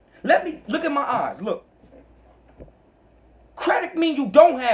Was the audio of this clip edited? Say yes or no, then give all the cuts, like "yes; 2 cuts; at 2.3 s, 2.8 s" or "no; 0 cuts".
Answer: yes; 1 cut; at 1.6 s